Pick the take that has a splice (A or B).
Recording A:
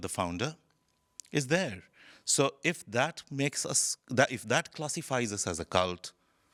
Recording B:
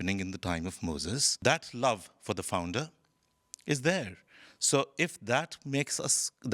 B